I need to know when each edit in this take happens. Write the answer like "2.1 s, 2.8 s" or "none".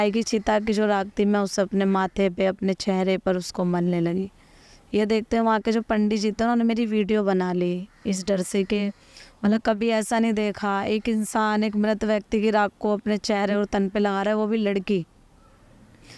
none

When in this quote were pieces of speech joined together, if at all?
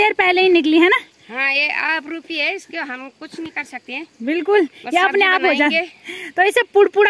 none

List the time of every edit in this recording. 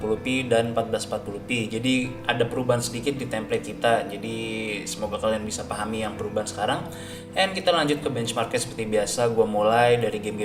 none

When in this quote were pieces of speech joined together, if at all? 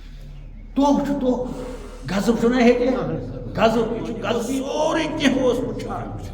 4.4 s

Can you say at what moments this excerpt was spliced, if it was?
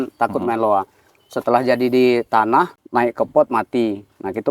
2.8 s

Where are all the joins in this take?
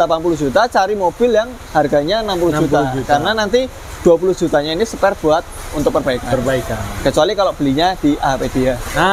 none

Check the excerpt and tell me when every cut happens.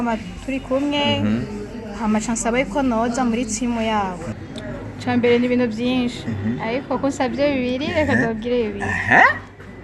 4.3 s

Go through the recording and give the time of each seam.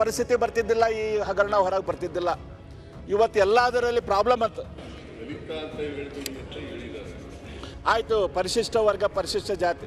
none

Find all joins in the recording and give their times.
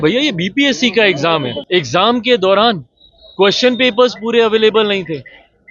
1.6 s

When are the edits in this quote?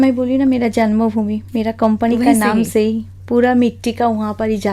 none

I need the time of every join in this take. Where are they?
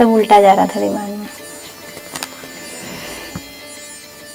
none

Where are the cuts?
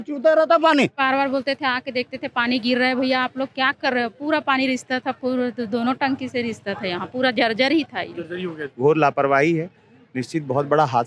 1.0 s, 8.7 s

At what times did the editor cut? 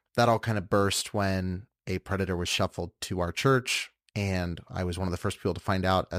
none

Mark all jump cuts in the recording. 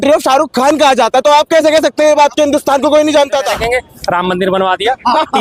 3.5 s

